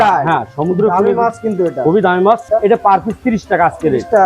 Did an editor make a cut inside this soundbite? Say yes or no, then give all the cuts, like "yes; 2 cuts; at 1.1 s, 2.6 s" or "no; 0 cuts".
yes; 1 cut; at 2.4 s